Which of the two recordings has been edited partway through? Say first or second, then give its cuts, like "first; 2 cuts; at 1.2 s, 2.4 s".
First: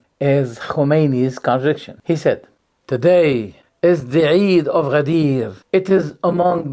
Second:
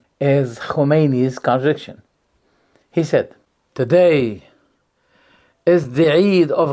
first; 3 cuts; at 1.9 s, 3.6 s, 5.6 s